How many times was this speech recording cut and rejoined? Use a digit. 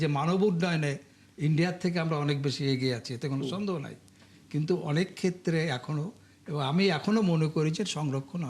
0